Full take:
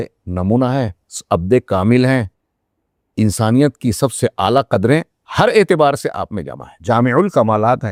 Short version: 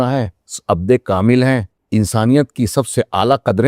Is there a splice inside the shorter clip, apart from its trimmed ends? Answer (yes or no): yes